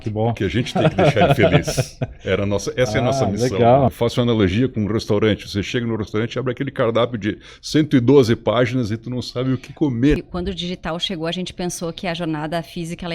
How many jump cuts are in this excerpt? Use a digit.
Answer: 2